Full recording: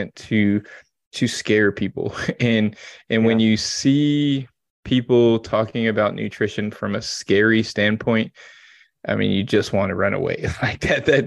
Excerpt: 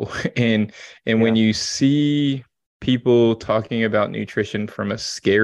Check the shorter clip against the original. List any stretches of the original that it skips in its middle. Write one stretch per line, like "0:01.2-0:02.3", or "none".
none